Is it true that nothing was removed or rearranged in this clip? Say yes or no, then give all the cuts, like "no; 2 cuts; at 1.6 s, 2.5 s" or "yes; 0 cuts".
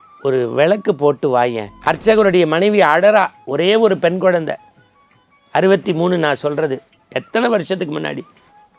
no; 1 cut; at 1.7 s